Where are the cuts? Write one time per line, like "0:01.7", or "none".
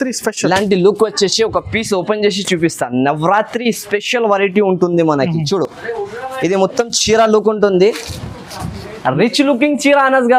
none